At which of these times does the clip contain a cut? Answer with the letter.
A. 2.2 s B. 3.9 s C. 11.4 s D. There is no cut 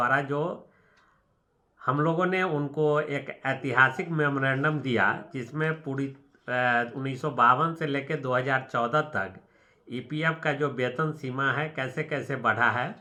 D